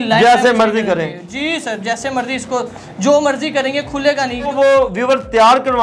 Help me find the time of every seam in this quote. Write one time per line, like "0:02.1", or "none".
0:04.5